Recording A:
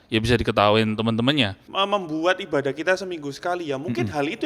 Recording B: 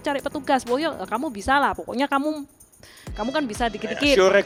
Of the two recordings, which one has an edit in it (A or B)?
A